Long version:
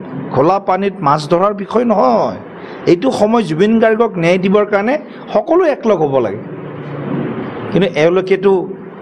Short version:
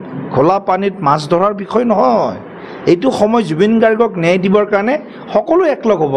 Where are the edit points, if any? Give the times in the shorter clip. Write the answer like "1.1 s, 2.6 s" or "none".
none